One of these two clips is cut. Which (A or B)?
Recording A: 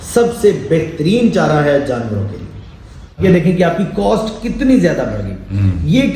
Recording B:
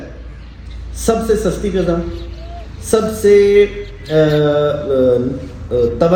A